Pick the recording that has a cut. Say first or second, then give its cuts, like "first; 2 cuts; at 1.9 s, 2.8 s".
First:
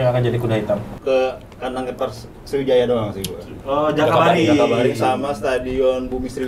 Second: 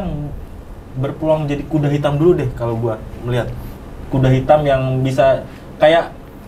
first; 1 cut; at 0.9 s